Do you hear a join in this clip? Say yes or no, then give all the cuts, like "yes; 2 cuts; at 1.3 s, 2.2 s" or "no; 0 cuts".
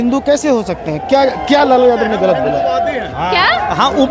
no; 0 cuts